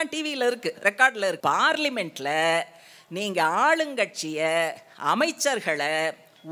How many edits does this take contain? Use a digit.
1